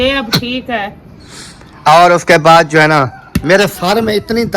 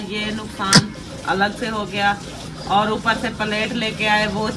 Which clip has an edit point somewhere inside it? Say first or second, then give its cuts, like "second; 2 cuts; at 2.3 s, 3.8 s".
first; 1 cut; at 3.4 s